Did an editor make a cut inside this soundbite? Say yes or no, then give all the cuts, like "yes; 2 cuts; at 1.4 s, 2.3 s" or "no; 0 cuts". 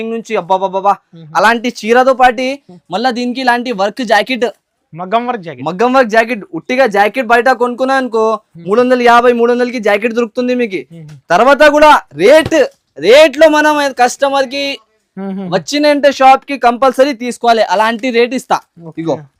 no; 0 cuts